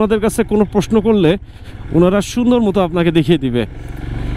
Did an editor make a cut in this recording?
no; 0 cuts

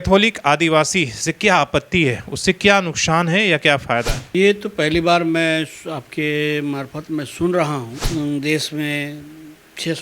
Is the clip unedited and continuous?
no; 2 cuts; at 4.2 s, 8.0 s

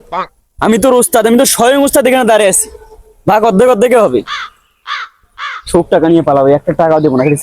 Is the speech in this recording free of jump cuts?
yes; 0 cuts

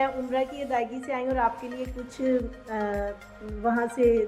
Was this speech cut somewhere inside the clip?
no; 0 cuts

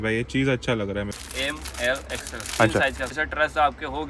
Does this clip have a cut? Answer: yes; 2 cuts; at 1.1 s, 3.2 s

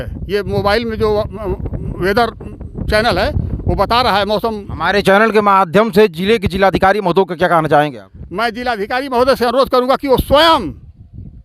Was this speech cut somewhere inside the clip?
no; 0 cuts

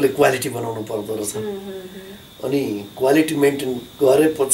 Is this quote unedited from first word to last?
yes; 0 cuts

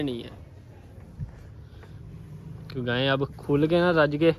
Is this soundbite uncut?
yes; 0 cuts

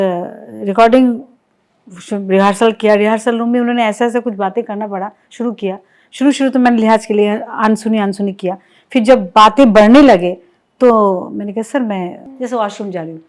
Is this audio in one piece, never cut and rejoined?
no; 1 cut; at 12.2 s

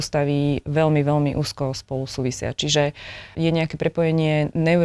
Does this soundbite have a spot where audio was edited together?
yes; 1 cut; at 3.3 s

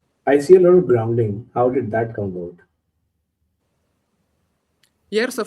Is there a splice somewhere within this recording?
no; 0 cuts

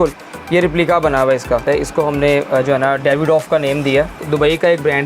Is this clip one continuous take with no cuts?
no; 2 cuts; at 1.6 s, 4.2 s

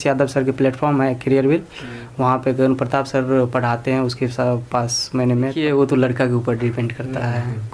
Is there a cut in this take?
yes; 1 cut; at 5.6 s

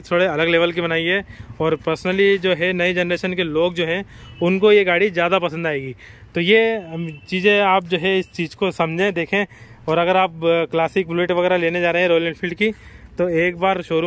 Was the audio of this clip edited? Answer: no; 0 cuts

